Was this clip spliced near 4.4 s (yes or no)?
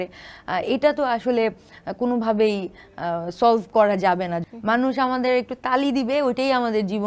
yes